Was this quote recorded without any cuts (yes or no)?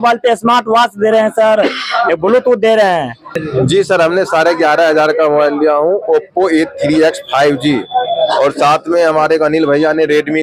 no